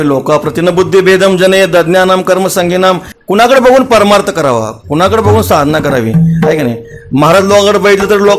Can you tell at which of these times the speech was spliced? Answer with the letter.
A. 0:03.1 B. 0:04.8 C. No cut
A